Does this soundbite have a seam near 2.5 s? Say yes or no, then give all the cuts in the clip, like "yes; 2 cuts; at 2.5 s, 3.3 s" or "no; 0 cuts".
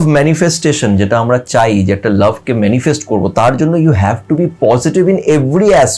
no; 0 cuts